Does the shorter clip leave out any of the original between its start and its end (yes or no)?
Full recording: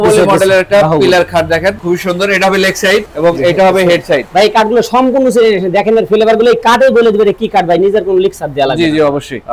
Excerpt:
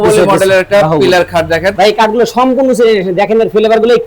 yes